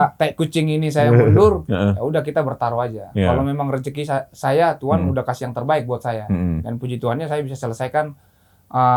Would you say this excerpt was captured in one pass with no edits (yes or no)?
yes